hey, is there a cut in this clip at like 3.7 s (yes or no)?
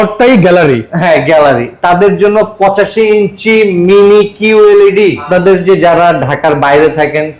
no